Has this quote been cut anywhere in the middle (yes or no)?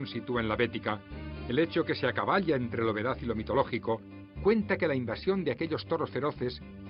yes